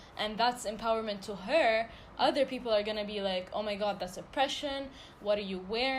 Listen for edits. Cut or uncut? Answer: uncut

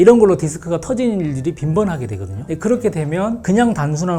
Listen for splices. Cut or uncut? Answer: uncut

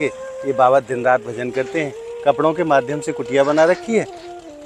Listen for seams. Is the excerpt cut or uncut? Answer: uncut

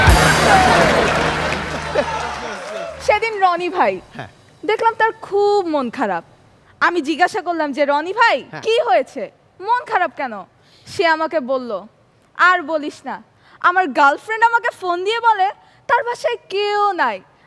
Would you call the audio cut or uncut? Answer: cut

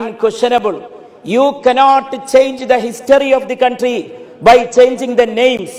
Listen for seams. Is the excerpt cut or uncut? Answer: uncut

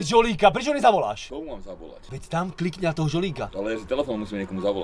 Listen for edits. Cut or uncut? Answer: cut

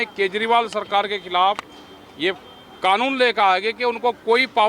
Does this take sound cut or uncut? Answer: uncut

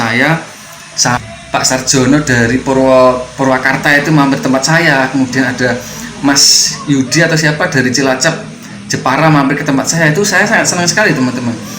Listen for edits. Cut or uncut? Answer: cut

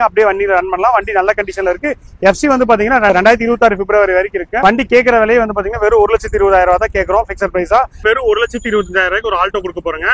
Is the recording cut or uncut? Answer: cut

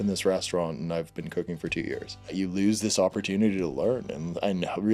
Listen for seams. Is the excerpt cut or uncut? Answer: cut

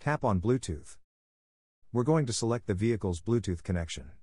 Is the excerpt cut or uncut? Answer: cut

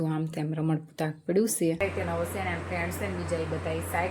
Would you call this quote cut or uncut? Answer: cut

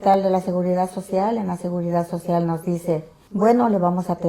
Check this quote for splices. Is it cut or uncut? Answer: cut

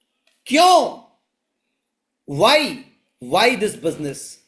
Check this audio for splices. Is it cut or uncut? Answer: uncut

